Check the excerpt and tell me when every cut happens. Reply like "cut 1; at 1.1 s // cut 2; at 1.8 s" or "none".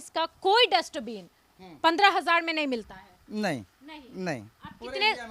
none